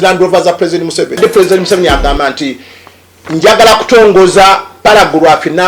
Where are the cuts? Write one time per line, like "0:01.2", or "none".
0:01.2